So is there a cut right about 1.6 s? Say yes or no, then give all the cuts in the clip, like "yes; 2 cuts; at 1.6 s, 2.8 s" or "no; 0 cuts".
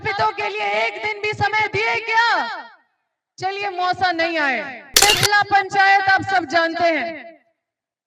no; 1 cut; at 5.0 s